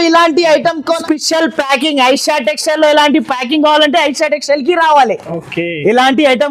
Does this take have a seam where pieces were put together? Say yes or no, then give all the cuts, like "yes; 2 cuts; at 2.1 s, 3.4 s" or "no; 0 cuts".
yes; 1 cut; at 1.0 s